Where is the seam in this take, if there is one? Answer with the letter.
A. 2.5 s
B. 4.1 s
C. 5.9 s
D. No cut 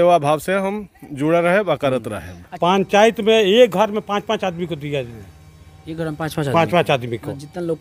A